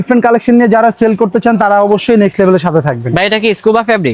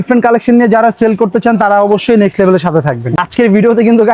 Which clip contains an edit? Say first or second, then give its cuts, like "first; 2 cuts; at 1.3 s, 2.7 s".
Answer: second; 1 cut; at 3.1 s